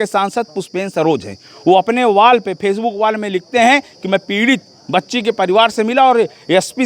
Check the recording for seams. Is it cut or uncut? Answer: uncut